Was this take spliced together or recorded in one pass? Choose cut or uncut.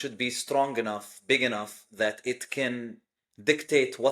uncut